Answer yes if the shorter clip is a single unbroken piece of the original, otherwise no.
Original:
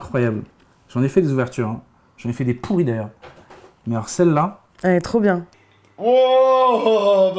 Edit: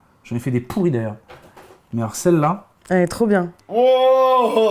no